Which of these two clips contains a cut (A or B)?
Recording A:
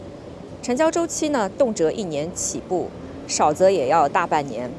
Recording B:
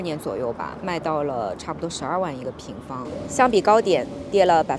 B